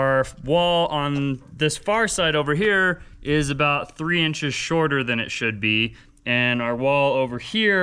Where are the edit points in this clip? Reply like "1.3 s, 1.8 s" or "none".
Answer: none